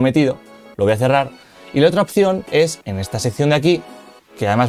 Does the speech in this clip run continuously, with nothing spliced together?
yes; 0 cuts

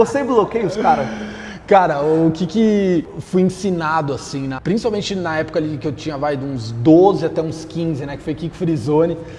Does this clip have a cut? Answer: no; 0 cuts

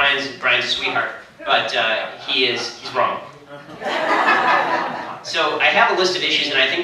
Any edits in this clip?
yes; 1 cut; at 1.4 s

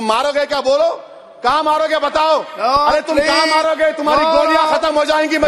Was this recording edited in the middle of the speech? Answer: no; 0 cuts

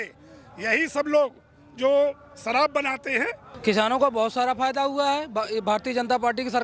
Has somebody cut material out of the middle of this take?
yes; 1 cut; at 3.4 s

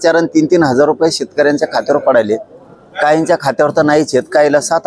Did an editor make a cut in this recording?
no; 0 cuts

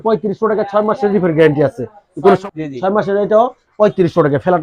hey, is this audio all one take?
no; 1 cut; at 2.4 s

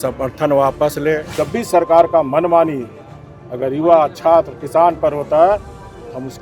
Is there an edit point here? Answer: yes; 1 cut; at 1.3 s

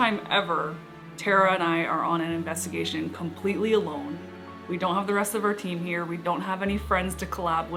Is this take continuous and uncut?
yes; 0 cuts

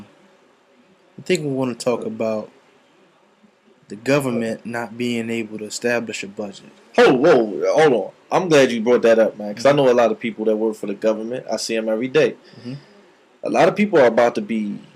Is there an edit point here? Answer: no; 0 cuts

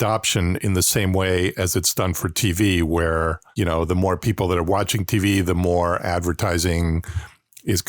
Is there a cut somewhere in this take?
no; 0 cuts

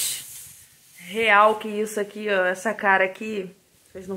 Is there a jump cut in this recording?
no; 0 cuts

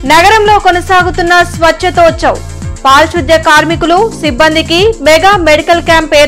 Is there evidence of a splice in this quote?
no; 0 cuts

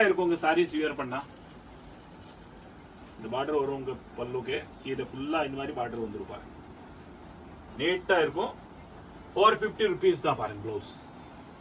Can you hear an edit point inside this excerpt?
no; 0 cuts

